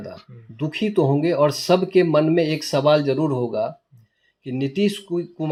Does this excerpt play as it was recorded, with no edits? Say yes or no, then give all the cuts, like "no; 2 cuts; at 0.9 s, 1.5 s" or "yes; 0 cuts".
yes; 0 cuts